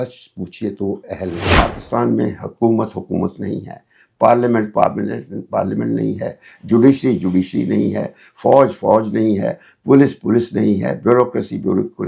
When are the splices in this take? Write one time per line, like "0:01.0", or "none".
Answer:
0:01.5

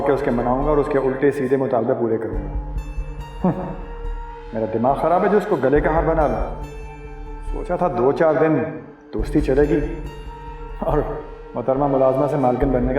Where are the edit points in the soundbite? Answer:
none

